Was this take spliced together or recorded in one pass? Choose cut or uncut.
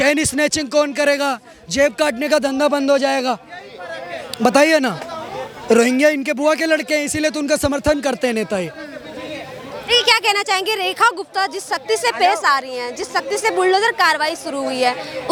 uncut